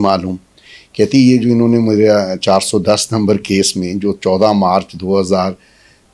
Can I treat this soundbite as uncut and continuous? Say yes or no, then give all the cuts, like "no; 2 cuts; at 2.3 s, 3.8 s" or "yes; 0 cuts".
yes; 0 cuts